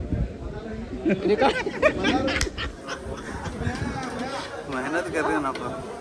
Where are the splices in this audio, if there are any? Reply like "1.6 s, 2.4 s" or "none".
none